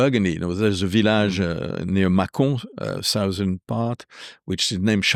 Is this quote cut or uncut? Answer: uncut